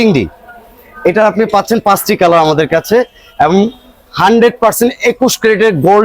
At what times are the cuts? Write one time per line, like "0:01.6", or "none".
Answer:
none